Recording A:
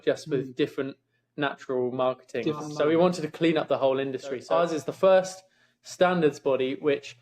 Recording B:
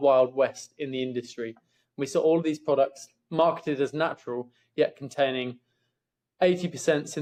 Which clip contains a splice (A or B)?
A